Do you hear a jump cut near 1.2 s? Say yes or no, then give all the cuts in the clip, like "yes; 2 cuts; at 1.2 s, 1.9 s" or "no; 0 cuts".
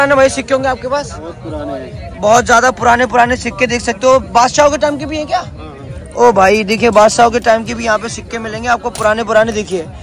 no; 0 cuts